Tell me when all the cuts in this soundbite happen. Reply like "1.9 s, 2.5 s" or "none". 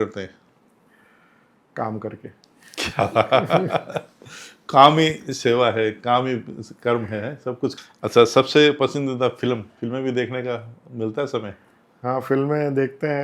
7.8 s

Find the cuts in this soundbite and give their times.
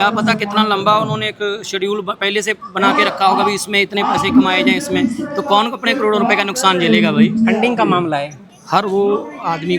8.5 s

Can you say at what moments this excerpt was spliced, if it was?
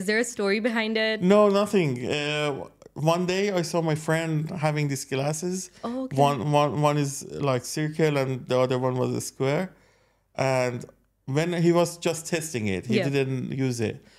none

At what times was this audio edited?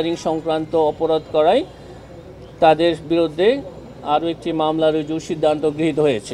none

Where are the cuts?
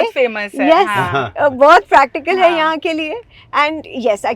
none

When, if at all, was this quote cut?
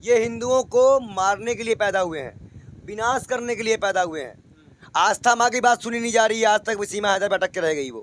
none

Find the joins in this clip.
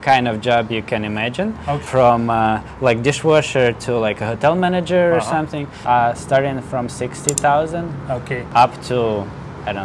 5.7 s, 8.5 s

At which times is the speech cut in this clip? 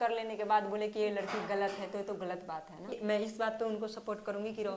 3.0 s

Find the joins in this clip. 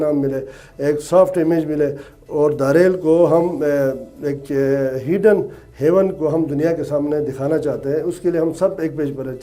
none

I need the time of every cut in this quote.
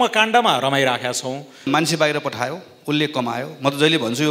1.7 s

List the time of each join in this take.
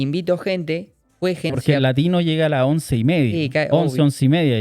1.5 s

